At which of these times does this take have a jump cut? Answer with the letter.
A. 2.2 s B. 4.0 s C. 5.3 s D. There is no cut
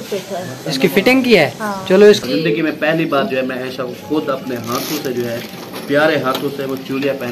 A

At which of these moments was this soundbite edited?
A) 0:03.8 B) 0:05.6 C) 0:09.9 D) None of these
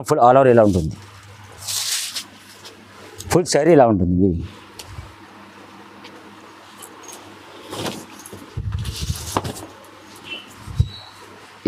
D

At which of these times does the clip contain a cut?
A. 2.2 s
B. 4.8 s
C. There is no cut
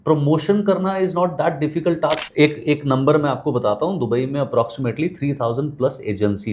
A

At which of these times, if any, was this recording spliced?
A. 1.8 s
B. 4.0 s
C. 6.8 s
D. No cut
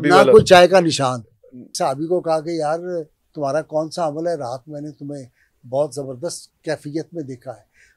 A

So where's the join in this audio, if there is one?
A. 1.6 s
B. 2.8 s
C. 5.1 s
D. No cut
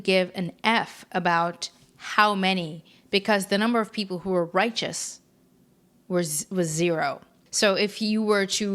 D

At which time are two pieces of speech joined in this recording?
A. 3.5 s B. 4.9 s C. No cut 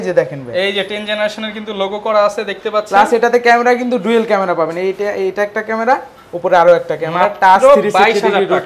C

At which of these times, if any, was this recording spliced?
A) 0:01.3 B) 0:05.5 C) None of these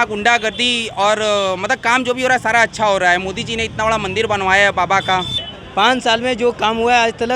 B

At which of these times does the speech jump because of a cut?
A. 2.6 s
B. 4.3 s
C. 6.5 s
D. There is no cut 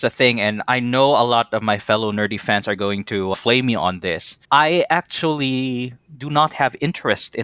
B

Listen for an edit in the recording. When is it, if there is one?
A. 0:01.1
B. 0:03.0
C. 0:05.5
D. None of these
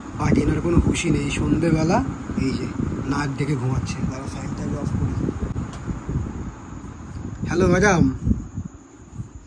D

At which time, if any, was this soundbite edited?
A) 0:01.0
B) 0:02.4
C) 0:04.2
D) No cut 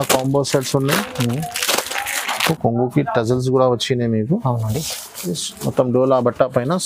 B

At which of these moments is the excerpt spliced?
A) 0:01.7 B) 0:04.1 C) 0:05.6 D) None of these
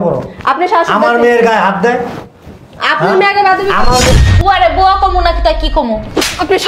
B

